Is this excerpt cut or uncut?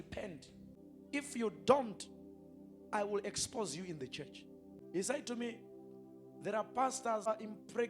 cut